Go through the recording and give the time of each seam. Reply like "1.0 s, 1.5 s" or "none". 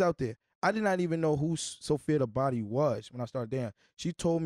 none